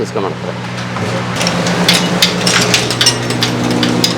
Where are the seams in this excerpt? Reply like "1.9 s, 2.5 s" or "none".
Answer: none